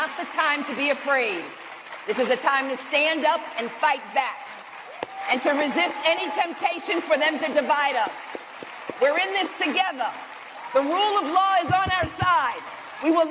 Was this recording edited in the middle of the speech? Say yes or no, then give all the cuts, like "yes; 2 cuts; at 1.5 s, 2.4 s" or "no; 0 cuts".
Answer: no; 0 cuts